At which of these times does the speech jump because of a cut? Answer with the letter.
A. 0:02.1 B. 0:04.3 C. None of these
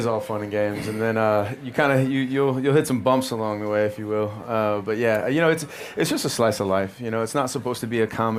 C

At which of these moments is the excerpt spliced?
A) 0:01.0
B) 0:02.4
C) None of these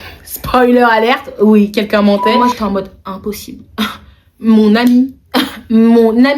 B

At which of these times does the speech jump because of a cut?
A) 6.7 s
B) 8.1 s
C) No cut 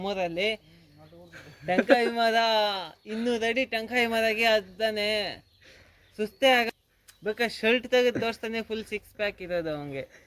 A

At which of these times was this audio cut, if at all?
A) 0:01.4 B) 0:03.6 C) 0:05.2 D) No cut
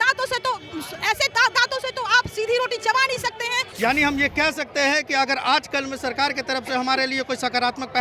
B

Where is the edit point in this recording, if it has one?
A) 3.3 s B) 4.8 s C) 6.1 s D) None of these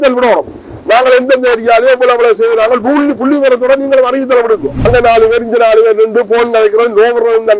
B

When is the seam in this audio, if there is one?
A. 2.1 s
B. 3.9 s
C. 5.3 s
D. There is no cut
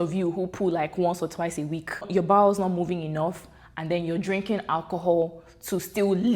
A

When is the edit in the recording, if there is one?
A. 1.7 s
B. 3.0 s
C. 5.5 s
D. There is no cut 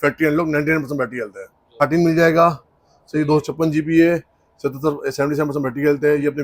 A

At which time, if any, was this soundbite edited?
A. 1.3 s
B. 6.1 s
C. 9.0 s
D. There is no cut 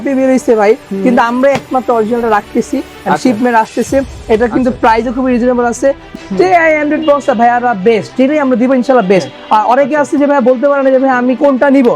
B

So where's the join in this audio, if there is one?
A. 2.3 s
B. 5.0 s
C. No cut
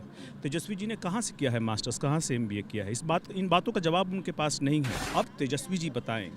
B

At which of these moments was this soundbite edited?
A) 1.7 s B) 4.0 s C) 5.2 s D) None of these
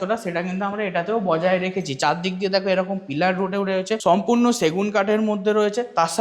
B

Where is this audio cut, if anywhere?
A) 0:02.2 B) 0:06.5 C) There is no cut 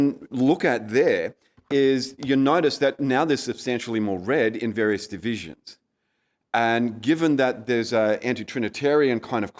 C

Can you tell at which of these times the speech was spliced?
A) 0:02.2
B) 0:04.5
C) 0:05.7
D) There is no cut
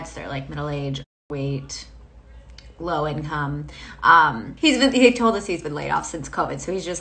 B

